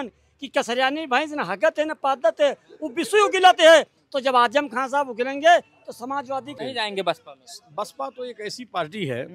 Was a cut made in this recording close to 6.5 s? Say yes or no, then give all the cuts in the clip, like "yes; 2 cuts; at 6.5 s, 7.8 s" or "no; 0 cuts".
yes; 1 cut; at 6.5 s